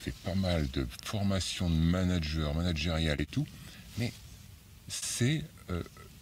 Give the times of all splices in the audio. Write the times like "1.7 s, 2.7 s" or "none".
none